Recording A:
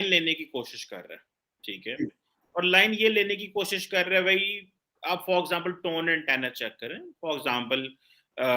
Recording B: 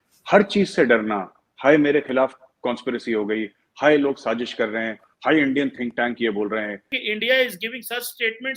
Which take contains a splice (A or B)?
B